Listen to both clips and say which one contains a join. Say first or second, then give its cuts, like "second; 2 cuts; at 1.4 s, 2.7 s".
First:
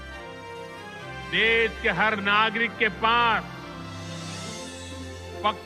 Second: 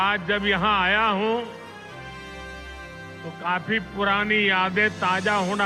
first; 1 cut; at 1.3 s